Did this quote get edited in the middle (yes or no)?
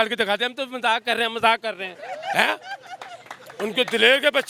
no